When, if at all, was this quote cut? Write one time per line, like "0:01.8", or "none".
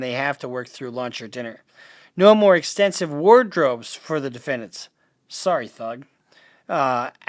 none